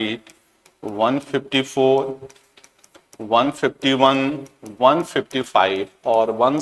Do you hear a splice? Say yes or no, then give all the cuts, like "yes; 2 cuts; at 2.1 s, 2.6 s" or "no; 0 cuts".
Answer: no; 0 cuts